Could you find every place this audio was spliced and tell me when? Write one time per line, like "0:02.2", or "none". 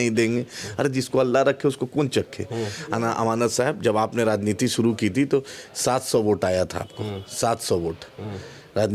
none

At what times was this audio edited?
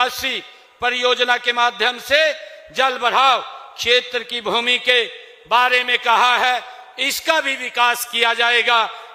none

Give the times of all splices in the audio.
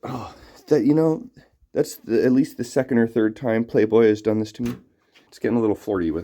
0:05.3

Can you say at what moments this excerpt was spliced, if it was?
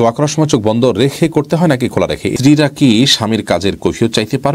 0:02.3

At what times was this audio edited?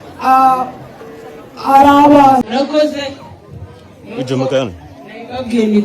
0:02.4

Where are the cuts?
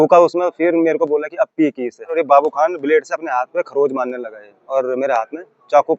0:02.1
0:04.6

